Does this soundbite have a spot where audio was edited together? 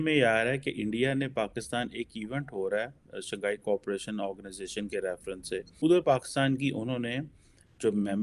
yes; 1 cut; at 5.7 s

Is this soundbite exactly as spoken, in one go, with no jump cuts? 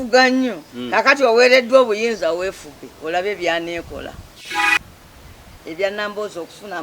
no; 1 cut; at 4.5 s

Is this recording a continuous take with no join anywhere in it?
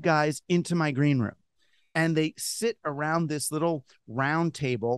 yes; 0 cuts

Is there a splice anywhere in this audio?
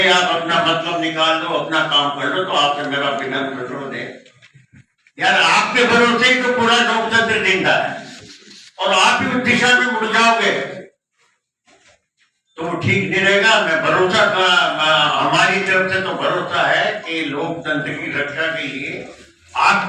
no; 0 cuts

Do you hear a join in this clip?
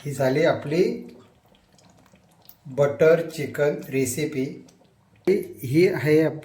yes; 1 cut; at 5.3 s

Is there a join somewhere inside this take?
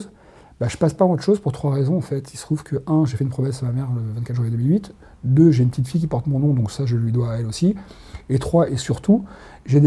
no; 0 cuts

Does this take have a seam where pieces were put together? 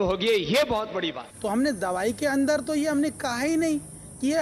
yes; 1 cut; at 1.2 s

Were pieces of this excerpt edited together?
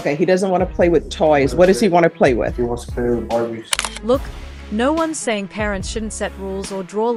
no; 0 cuts

